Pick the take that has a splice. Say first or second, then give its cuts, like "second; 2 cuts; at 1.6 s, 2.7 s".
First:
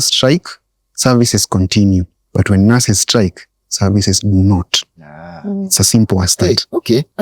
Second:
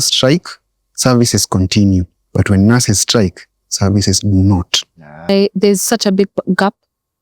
second; 1 cut; at 5.3 s